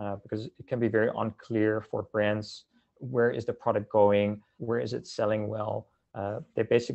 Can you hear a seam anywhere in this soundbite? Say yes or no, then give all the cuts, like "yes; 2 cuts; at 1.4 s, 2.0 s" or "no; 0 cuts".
yes; 1 cut; at 4.5 s